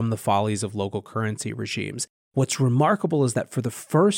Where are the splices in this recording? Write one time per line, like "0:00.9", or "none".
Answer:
0:02.1